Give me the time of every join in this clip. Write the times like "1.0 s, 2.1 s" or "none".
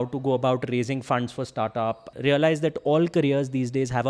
2.1 s